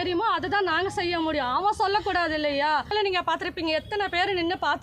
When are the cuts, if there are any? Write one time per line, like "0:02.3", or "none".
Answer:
0:02.9